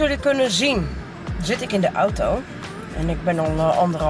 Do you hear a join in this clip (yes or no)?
no